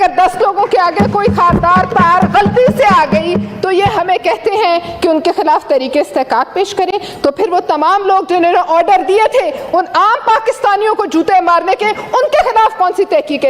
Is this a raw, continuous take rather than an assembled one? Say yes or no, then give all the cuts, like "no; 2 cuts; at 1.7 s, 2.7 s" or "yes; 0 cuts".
yes; 0 cuts